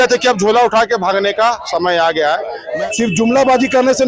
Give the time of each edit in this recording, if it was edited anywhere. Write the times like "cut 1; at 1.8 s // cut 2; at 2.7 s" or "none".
cut 1; at 2.6 s